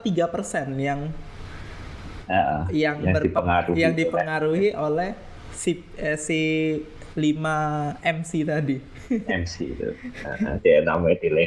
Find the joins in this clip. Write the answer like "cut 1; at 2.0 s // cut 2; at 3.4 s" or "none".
none